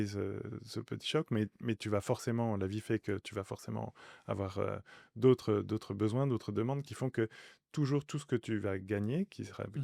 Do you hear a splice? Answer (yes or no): no